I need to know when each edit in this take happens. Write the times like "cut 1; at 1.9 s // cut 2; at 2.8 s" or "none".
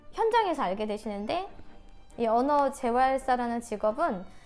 cut 1; at 1.6 s